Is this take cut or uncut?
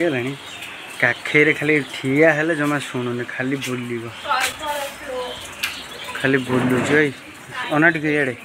uncut